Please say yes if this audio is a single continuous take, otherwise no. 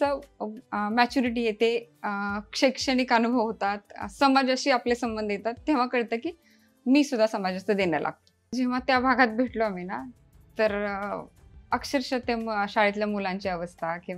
no